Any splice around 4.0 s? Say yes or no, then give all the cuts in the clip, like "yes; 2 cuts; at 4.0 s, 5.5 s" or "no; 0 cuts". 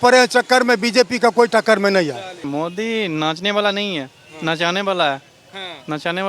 no; 1 cut; at 2.4 s